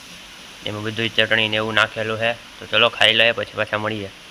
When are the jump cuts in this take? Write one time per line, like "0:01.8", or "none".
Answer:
none